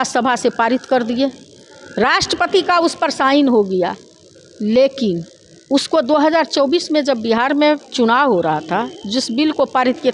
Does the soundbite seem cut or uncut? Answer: uncut